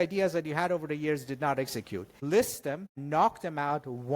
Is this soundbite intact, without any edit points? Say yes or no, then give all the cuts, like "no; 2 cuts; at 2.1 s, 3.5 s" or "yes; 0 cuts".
no; 2 cuts; at 2.1 s, 2.9 s